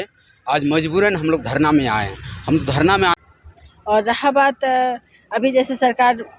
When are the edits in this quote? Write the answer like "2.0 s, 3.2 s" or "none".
3.2 s